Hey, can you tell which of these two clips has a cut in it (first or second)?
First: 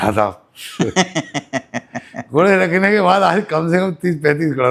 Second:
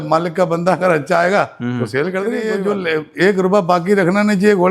second